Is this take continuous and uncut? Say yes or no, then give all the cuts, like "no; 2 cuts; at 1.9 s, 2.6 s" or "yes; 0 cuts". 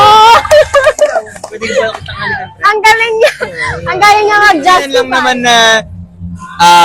no; 1 cut; at 4.9 s